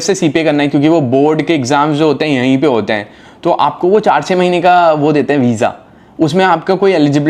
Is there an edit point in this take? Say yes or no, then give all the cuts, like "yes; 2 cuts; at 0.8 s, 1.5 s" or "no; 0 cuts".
no; 0 cuts